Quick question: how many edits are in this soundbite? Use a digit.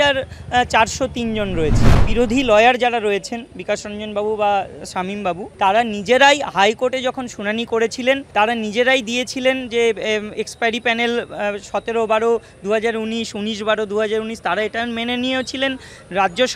3